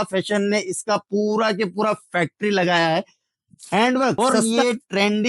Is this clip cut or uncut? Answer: cut